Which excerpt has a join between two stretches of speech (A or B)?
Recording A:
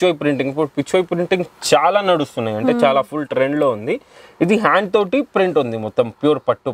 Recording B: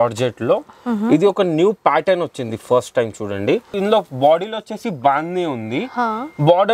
B